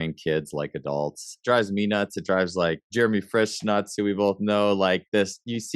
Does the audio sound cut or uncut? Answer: cut